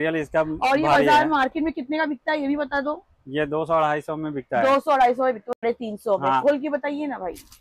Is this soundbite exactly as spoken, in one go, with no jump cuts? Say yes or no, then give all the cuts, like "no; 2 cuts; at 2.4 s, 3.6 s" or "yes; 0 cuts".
no; 1 cut; at 5.6 s